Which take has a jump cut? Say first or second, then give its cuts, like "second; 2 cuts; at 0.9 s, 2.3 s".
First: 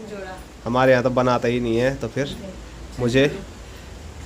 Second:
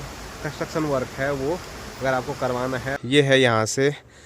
second; 1 cut; at 2.9 s